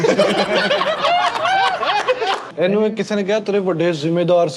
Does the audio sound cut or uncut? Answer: cut